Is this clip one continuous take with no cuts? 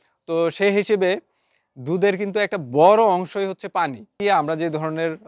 no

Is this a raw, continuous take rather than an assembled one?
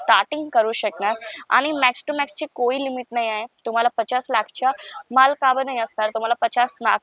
yes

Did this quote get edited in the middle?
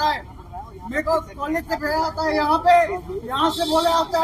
no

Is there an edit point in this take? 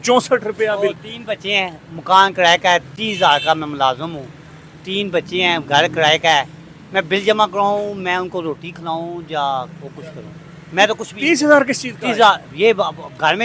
no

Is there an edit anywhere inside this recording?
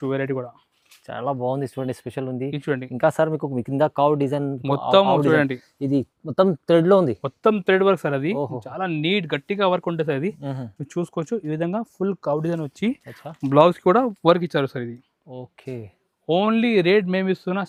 no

